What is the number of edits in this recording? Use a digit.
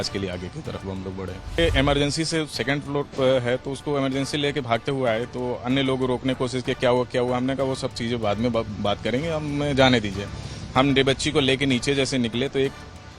1